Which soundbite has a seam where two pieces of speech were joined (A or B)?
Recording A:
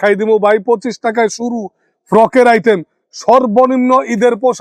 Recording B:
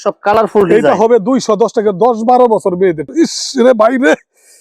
B